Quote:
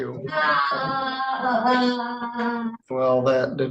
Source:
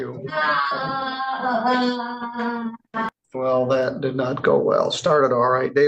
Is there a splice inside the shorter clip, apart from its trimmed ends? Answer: yes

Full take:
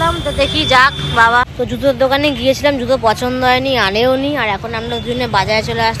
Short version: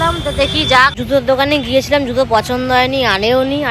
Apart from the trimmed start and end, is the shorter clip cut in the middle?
yes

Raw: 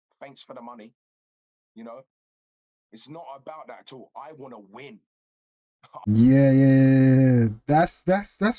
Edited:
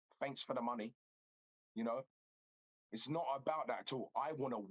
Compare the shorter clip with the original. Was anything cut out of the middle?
no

